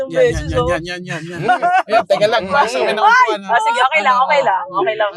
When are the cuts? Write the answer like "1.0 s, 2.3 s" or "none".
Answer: none